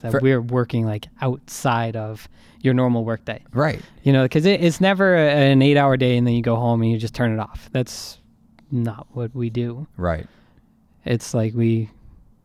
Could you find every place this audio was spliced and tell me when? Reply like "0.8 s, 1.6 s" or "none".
none